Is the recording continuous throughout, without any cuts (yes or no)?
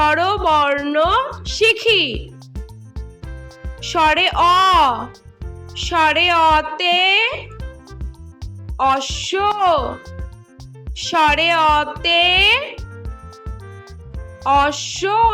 no